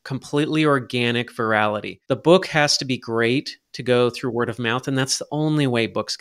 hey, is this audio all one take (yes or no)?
no